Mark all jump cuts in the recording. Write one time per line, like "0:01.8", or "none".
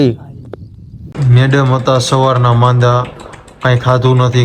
0:01.0